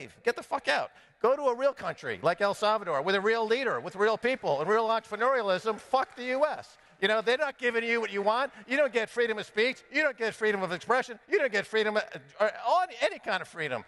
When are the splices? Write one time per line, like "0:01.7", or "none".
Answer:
none